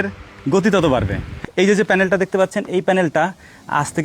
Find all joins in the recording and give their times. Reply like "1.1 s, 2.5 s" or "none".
1.4 s